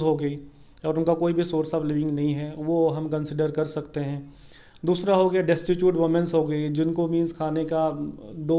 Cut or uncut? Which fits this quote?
uncut